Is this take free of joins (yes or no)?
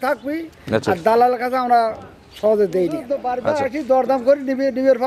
no